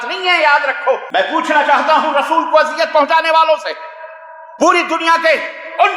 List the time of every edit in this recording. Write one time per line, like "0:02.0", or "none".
0:01.0